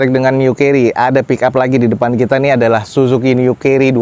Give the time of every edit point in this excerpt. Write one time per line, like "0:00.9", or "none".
none